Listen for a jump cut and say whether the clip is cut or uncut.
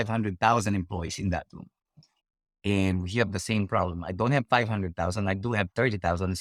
uncut